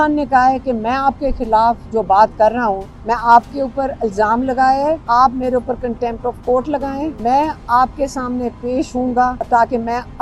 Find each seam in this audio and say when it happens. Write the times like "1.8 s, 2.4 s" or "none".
2.9 s, 5.0 s, 7.2 s, 9.4 s